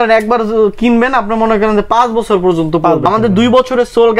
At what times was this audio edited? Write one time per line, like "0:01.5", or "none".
0:03.0